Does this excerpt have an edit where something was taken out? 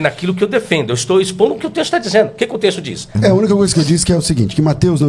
yes; 1 cut; at 3.1 s

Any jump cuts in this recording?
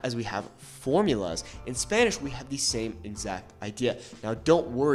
no; 0 cuts

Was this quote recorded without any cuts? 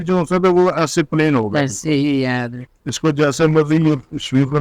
no; 1 cut; at 2.6 s

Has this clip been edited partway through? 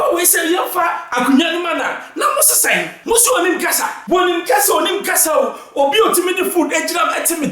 yes; 2 cuts; at 2.9 s, 3.9 s

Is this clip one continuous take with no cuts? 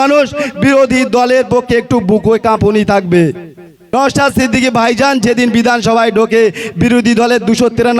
no; 1 cut; at 3.9 s

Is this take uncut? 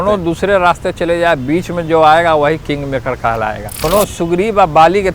no; 1 cut; at 3.8 s

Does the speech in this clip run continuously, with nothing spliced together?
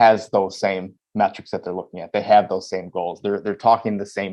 yes; 0 cuts

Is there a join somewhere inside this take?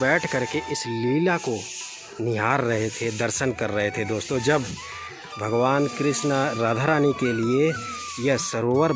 no; 0 cuts

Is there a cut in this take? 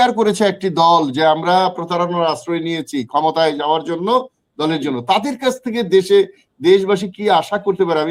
no; 0 cuts

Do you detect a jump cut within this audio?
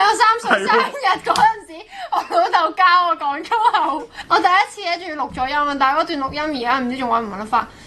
yes; 1 cut; at 4.1 s

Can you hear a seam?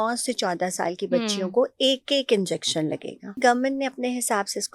yes; 1 cut; at 3.4 s

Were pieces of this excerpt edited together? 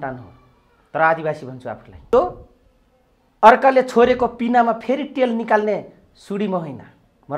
yes; 1 cut; at 2.0 s

